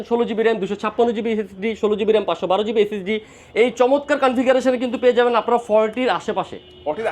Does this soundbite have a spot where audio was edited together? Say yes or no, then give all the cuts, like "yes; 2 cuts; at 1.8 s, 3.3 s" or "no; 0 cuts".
no; 0 cuts